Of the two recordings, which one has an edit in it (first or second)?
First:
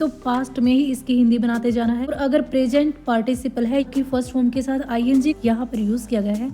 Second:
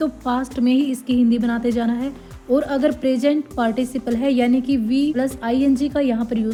first